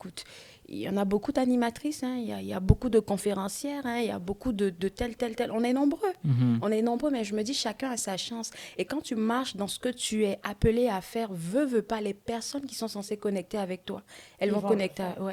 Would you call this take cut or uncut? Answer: uncut